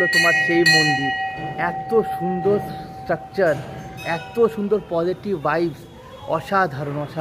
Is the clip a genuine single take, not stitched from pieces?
yes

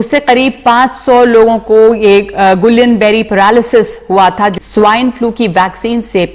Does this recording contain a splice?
yes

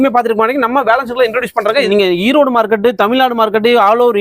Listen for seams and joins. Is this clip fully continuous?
no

